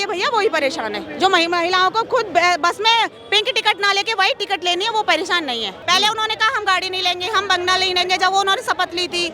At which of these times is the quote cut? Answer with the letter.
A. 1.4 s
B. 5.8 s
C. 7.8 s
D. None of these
B